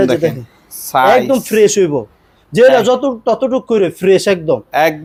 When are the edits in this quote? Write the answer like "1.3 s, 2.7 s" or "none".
none